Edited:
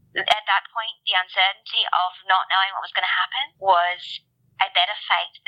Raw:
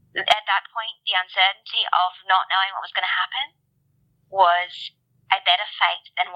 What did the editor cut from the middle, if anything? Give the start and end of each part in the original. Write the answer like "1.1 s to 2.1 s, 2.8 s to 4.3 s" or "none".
3.5 s to 4.2 s

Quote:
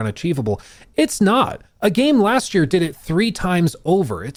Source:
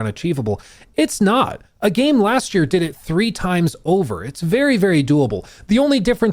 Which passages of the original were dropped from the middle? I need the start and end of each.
none

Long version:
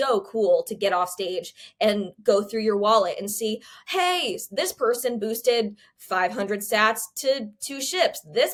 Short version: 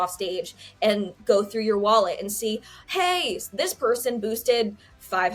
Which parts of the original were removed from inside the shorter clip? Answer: none

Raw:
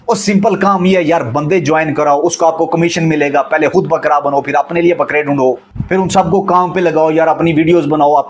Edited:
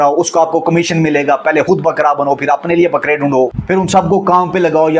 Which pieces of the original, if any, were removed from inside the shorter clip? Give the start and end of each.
5.6 s to 5.8 s

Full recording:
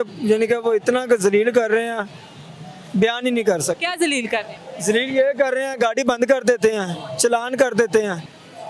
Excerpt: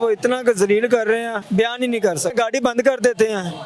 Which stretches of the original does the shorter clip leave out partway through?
2.0 s to 2.8 s, 3.8 s to 5.8 s

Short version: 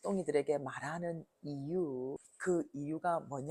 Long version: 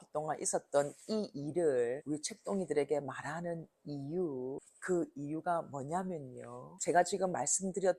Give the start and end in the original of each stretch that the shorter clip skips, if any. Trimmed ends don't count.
none

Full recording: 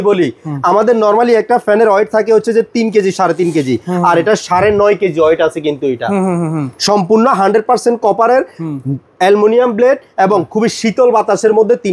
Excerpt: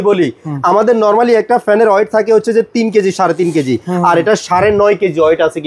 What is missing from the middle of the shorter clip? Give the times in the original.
none

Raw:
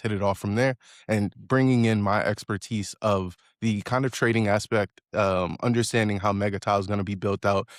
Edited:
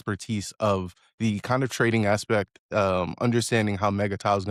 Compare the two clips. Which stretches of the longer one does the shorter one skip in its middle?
none

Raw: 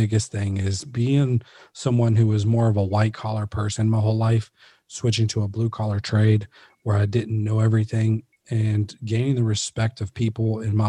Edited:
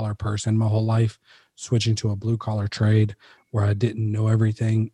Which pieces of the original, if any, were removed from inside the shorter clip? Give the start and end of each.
none

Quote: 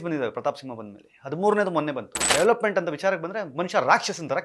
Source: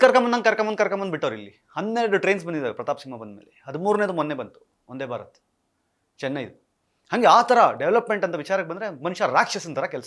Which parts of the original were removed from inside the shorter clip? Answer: 4.7 s to 7.8 s

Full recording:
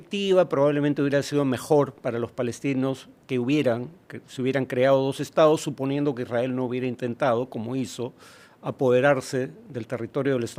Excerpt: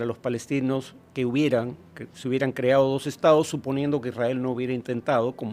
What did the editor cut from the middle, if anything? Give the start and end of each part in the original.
none

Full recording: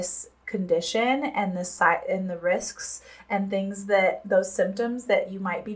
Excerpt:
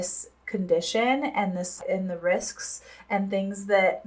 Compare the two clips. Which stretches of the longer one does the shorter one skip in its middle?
1.8 s to 2.0 s

